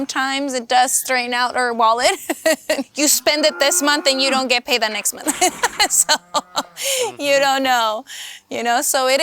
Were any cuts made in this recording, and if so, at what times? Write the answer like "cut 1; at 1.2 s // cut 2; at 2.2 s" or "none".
cut 1; at 2.9 s